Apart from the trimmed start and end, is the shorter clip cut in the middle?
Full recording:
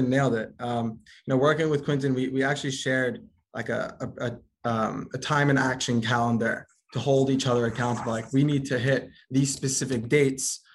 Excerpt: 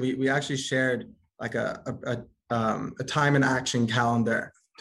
no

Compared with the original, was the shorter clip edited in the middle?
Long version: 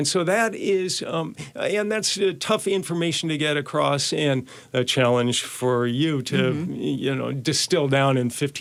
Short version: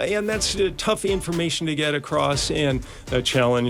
no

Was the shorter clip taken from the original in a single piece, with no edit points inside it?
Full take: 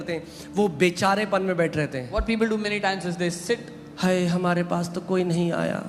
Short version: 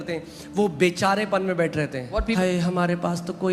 no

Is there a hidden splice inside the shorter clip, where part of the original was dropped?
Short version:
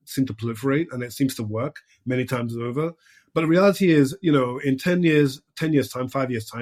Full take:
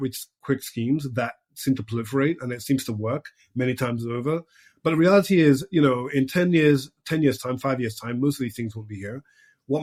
no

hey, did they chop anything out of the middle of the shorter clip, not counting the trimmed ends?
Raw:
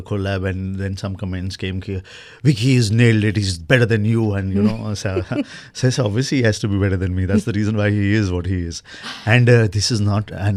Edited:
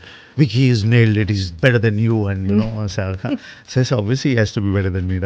no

